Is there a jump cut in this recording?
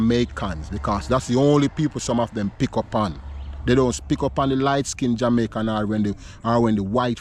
no; 0 cuts

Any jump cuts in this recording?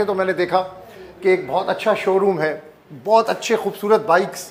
no; 0 cuts

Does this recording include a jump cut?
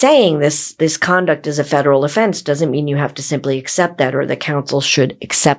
no; 0 cuts

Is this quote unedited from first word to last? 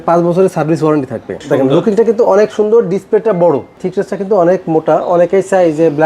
no; 2 cuts; at 1.4 s, 3.8 s

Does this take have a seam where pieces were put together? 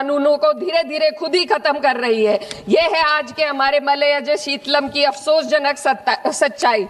no; 0 cuts

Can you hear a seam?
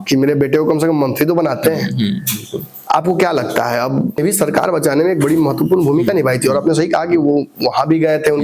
yes; 1 cut; at 4.2 s

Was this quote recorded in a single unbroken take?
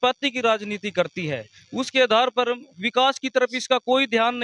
yes; 0 cuts

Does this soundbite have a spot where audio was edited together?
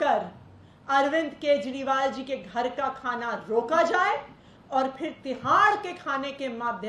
no; 0 cuts

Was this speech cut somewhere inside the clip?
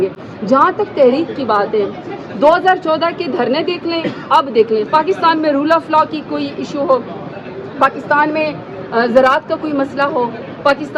no; 0 cuts

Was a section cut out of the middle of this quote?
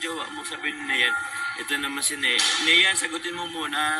no; 0 cuts

